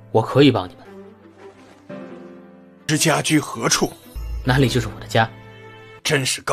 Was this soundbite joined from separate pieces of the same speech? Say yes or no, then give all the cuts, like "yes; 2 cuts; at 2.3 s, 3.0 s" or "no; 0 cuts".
no; 0 cuts